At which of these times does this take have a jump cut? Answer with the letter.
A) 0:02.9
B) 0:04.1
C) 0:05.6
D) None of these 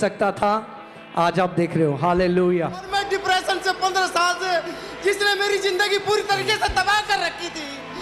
A